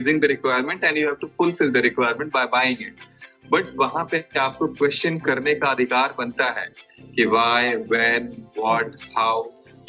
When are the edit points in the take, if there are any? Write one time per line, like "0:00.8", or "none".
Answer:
none